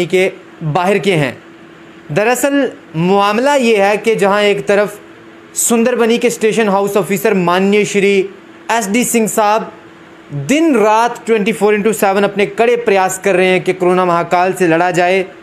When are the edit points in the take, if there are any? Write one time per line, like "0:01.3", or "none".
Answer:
none